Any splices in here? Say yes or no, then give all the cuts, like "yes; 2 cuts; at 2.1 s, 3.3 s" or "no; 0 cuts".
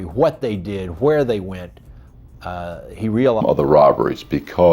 yes; 1 cut; at 3.4 s